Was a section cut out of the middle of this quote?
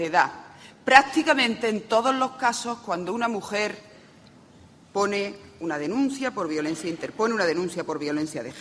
yes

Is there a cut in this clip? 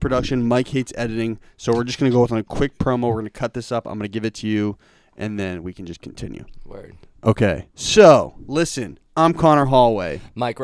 no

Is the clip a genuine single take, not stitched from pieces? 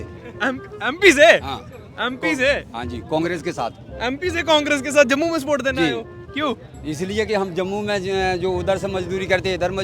yes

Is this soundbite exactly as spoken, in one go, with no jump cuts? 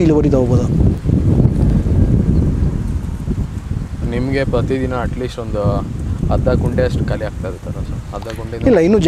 yes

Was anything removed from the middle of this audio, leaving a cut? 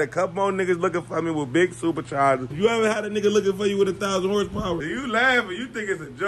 yes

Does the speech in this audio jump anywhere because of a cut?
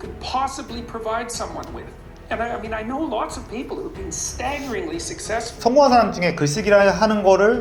no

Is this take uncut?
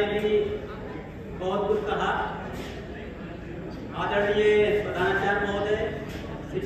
yes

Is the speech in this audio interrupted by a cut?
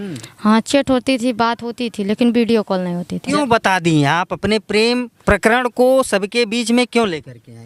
yes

